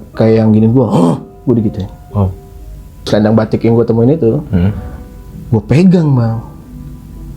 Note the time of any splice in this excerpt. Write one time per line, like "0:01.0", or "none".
0:03.1

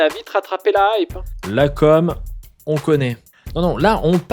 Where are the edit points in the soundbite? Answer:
0:01.4

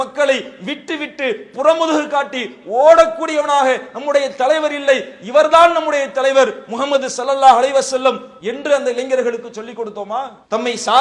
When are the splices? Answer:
none

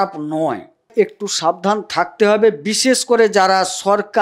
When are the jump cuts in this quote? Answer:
0:00.9

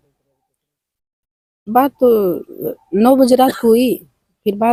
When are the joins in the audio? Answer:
none

